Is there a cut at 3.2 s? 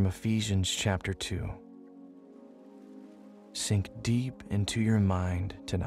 yes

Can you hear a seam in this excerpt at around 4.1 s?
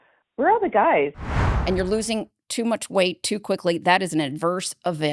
no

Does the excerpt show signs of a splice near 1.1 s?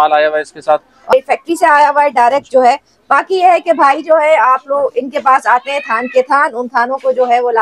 yes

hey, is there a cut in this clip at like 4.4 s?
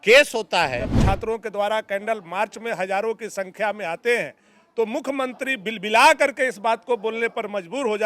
no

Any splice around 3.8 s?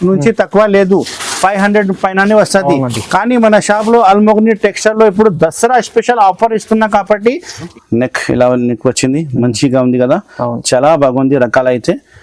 no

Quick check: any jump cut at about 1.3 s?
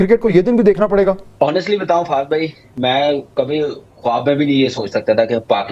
yes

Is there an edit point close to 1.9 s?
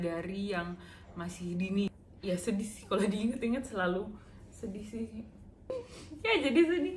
yes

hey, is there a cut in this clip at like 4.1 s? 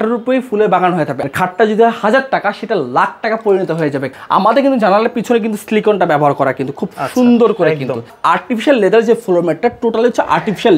yes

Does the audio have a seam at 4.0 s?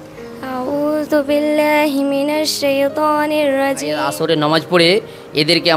yes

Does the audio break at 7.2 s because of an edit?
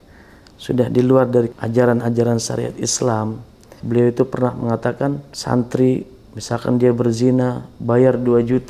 no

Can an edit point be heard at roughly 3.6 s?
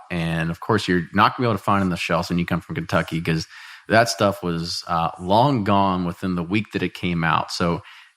no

